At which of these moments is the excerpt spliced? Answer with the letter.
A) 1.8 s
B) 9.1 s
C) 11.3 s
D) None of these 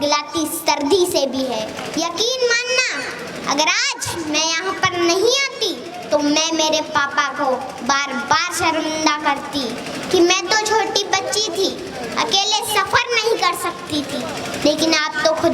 A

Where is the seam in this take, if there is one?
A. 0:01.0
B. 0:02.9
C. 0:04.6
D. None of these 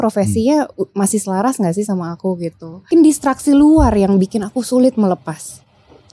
B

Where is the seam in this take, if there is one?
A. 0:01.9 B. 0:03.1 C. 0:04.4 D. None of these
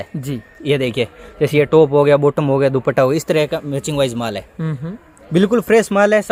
D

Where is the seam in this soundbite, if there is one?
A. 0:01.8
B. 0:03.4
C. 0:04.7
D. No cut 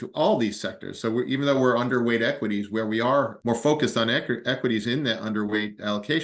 B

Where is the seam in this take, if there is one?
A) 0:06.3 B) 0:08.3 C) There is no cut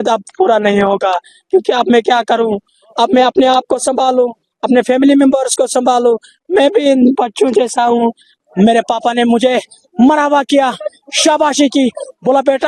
B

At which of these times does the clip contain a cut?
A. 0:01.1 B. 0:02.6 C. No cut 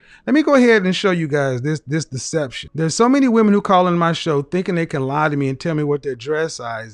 B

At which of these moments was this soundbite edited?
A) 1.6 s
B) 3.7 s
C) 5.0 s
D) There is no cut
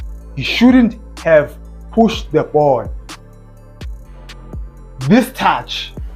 D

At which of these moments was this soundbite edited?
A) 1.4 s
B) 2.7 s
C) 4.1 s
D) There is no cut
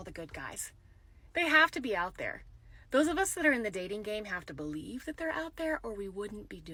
D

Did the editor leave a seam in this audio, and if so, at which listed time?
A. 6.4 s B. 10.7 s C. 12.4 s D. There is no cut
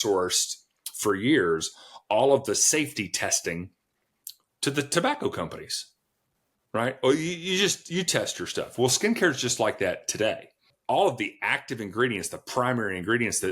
B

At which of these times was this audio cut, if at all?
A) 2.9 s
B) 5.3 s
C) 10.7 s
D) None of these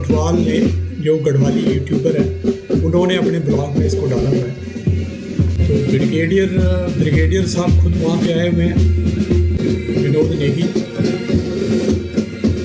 D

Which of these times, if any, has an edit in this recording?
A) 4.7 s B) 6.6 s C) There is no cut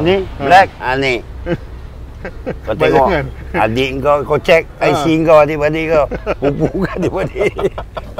C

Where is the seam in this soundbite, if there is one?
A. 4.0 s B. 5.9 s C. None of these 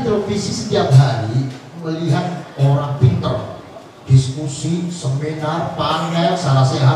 C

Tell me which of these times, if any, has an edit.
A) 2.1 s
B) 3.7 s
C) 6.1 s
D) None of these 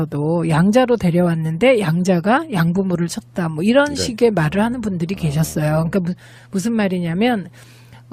D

